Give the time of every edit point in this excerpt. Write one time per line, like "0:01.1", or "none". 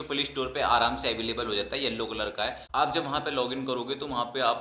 0:02.6